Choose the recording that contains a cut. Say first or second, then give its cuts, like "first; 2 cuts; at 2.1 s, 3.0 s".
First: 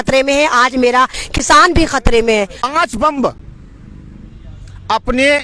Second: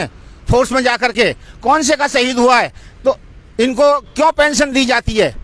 first; 1 cut; at 2.6 s